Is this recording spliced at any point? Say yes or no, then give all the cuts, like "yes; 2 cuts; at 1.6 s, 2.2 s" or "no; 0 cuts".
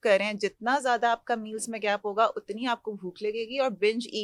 no; 0 cuts